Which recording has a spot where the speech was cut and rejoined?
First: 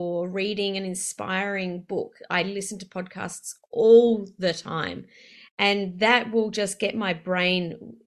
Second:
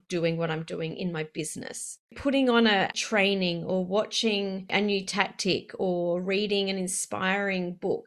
second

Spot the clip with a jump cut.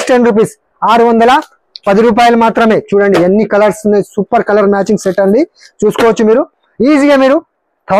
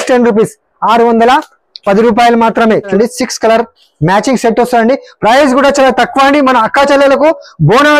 second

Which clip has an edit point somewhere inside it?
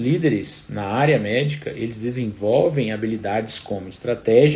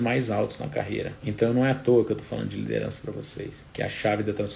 second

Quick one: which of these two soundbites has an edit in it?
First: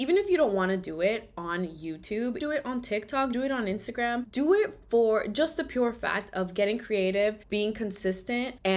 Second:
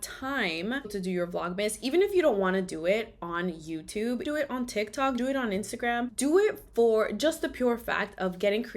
second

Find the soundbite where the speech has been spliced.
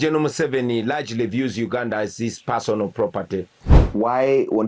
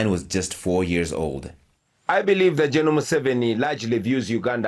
first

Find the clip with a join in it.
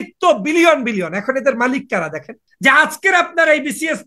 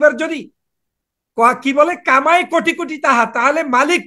first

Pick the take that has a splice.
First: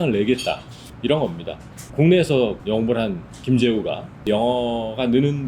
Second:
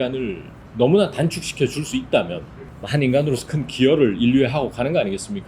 first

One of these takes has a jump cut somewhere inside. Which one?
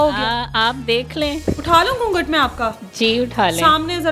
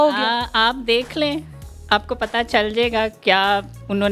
first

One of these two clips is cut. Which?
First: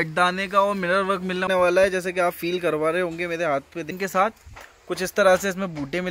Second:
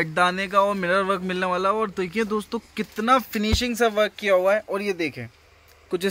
first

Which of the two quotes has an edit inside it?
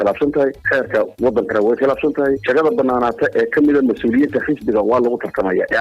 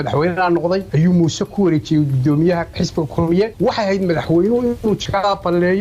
second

